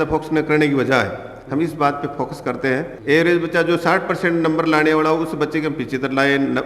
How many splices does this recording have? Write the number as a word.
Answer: one